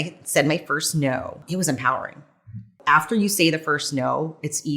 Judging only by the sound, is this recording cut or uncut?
cut